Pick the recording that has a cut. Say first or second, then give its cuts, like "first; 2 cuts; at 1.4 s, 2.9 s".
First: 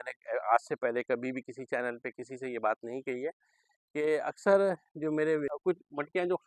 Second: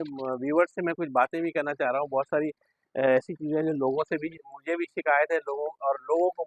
first; 1 cut; at 5.5 s